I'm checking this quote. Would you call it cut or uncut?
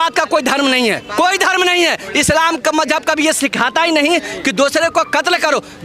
cut